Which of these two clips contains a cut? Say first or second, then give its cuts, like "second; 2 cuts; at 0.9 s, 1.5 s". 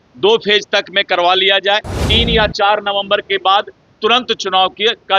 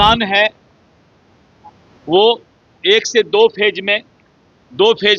first; 1 cut; at 2.1 s